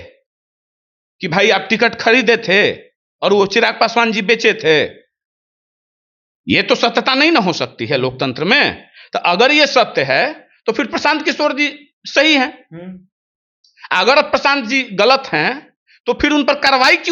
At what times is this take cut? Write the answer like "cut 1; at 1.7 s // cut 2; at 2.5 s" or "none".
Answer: none